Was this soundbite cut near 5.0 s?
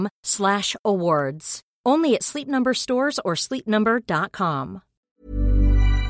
yes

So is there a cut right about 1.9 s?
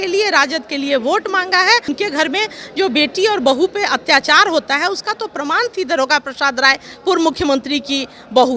yes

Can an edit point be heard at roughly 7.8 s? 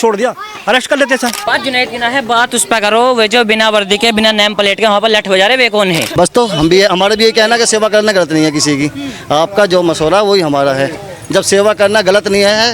no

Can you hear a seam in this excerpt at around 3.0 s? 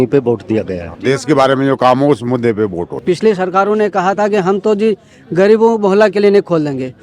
yes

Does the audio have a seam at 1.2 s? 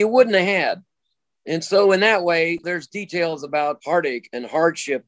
no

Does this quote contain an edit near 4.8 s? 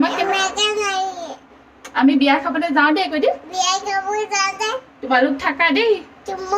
no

